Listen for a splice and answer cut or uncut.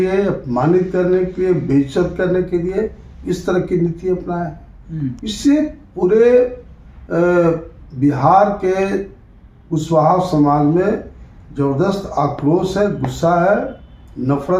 uncut